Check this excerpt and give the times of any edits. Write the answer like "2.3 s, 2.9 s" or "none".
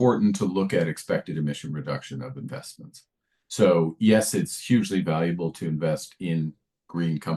none